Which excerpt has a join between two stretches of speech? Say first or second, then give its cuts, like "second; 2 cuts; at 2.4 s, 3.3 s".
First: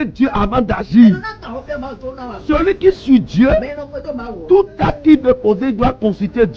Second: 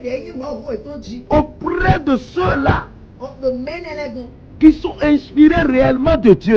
second; 1 cut; at 1.1 s